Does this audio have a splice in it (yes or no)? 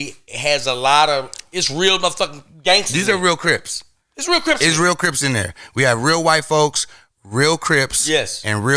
no